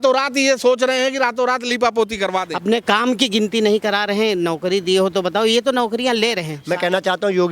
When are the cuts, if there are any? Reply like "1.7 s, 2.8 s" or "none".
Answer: 2.5 s, 6.5 s